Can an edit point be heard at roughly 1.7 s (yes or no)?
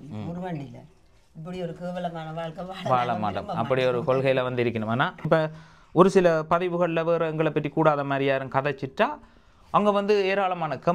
no